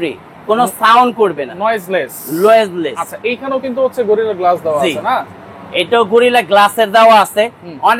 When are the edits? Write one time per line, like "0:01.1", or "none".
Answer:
none